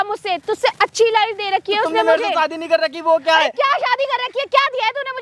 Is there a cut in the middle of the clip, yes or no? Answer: no